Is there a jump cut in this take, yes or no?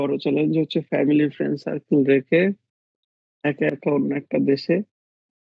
no